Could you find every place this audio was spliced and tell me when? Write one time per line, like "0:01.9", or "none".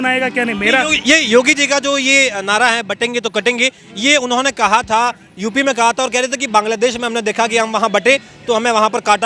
none